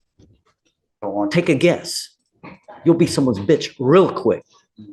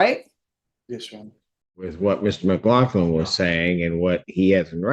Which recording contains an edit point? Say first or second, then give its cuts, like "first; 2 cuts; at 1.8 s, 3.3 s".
second; 1 cut; at 1.8 s